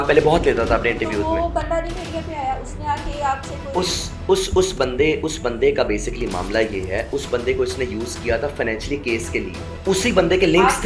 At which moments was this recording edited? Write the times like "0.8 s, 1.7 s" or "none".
9.6 s